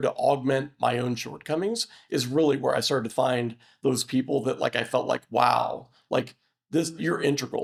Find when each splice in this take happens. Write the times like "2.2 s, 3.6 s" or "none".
none